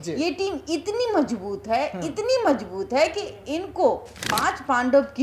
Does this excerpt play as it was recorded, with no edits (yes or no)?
no